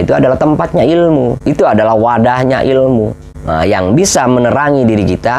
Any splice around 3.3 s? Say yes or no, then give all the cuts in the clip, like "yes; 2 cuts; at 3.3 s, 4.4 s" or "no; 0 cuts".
no; 1 cut; at 1.4 s